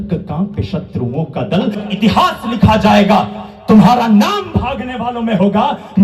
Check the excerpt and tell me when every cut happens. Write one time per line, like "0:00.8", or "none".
0:01.8